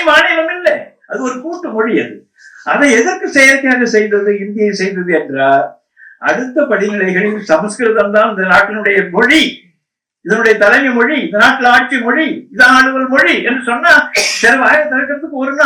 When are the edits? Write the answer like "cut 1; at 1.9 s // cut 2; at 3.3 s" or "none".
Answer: none